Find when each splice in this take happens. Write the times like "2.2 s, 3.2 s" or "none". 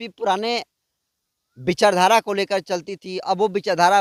none